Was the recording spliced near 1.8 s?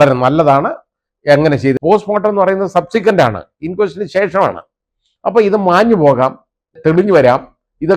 yes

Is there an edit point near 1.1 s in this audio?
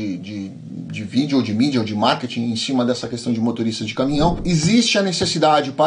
no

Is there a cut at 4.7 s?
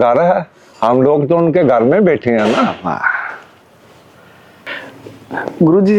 no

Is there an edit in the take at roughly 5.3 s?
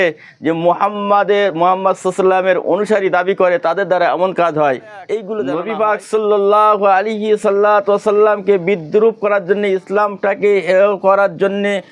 yes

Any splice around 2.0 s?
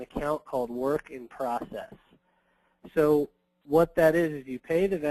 no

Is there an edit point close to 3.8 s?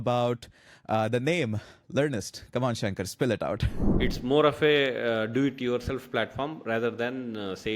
yes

